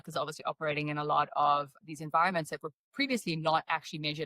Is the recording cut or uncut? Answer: cut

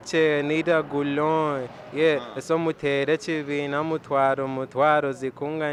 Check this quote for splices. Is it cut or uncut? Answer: uncut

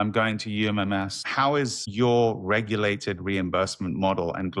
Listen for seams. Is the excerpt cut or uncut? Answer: cut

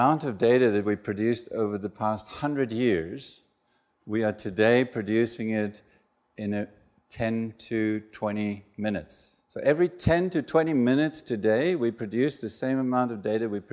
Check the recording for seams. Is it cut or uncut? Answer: uncut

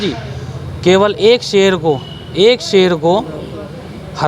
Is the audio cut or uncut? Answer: uncut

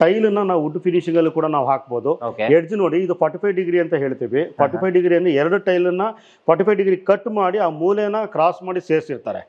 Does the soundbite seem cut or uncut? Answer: uncut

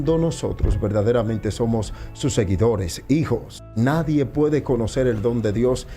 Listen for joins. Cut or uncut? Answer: cut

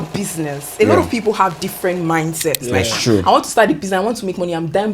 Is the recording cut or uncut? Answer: cut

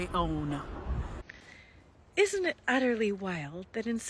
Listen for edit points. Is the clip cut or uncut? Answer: cut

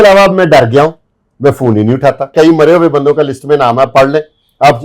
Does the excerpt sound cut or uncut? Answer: cut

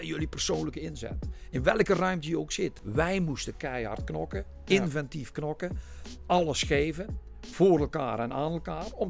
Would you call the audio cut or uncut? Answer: cut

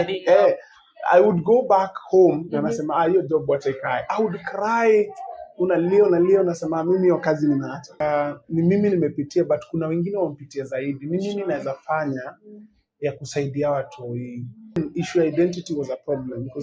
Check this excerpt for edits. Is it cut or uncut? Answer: cut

